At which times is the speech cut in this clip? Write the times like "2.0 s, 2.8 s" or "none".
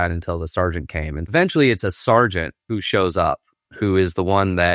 1.3 s, 2.6 s, 3.5 s